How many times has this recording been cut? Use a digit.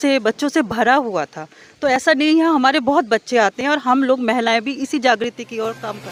0